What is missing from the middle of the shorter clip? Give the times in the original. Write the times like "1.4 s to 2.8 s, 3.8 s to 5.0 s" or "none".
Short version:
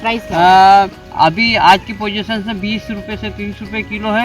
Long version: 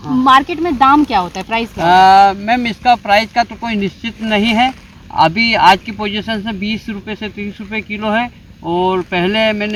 2.4 s to 4.9 s